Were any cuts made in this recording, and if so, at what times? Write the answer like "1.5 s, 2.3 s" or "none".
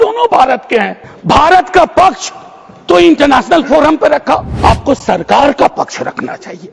1.1 s, 4.5 s